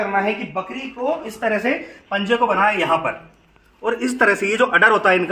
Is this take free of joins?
no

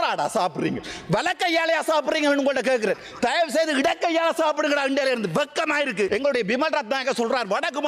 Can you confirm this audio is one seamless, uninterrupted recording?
no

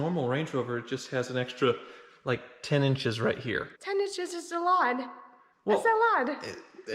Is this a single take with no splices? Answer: no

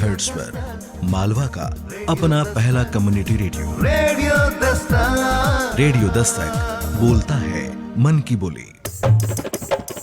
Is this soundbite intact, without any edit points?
no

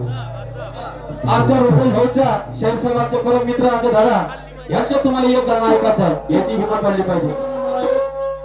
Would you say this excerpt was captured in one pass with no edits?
no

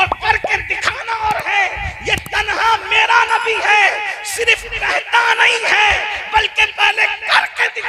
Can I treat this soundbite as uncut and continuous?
yes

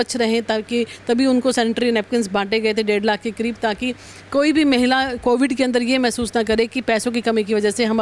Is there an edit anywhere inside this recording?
no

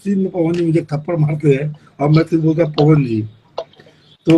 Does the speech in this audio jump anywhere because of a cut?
no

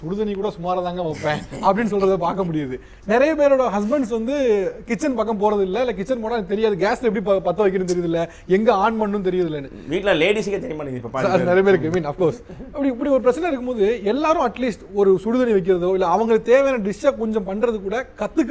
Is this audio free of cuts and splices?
yes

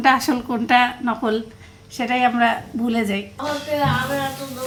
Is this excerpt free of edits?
yes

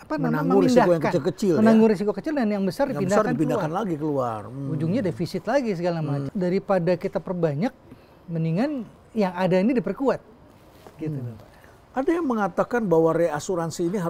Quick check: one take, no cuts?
no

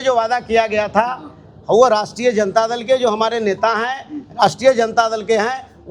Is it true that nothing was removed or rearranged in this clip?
yes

